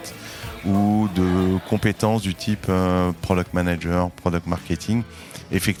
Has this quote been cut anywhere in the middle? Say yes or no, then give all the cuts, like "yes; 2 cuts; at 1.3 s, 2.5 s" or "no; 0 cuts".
no; 0 cuts